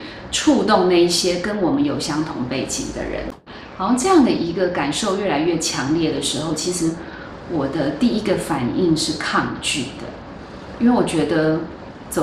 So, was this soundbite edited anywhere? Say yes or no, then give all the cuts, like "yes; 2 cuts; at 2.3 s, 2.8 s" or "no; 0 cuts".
yes; 1 cut; at 3.3 s